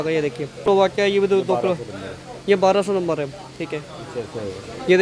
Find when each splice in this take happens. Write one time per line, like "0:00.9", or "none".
0:00.9